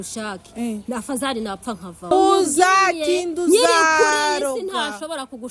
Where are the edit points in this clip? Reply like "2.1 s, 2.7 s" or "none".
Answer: 2.1 s

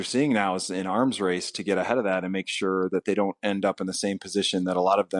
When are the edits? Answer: none

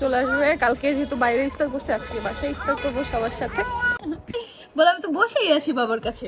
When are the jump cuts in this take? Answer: 3.9 s

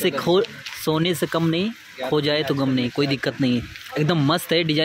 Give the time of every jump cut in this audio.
none

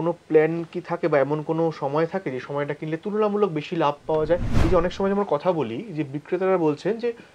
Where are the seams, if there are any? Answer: 4.5 s

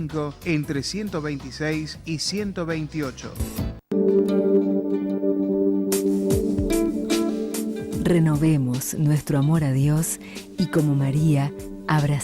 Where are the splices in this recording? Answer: 3.8 s

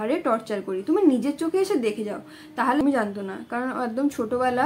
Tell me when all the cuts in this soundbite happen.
2.8 s

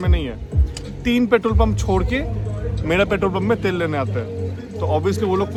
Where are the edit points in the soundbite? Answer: none

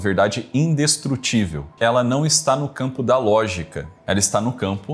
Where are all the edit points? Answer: 1.6 s, 3.9 s

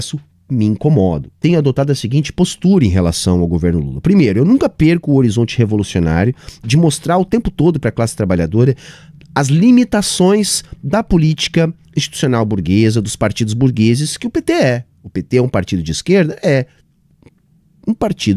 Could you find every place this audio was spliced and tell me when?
1.4 s

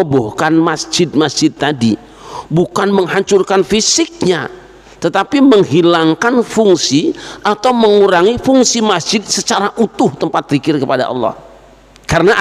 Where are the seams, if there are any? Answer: none

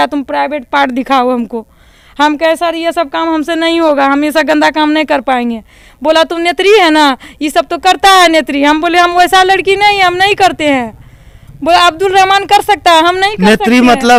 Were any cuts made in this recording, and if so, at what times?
none

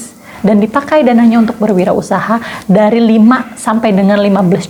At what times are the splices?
none

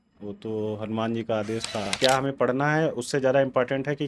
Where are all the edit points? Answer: 1.9 s

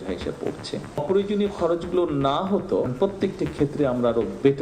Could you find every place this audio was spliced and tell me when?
1.0 s, 2.9 s

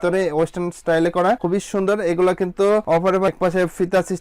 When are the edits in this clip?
1.4 s, 3.0 s

